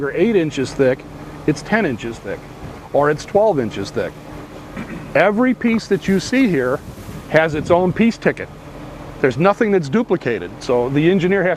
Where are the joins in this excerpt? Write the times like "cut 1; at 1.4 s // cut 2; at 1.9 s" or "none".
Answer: cut 1; at 10.5 s